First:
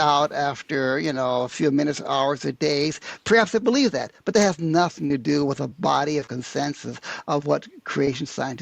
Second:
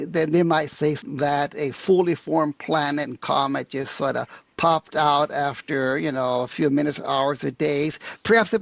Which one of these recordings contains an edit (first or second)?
second